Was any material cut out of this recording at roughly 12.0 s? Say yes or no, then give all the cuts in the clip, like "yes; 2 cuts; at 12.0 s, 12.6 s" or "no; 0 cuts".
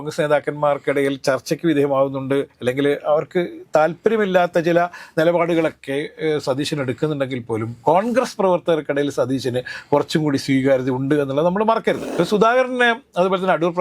yes; 1 cut; at 12.0 s